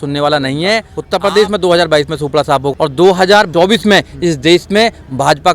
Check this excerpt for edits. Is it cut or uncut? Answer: cut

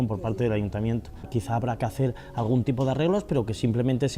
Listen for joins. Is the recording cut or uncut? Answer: cut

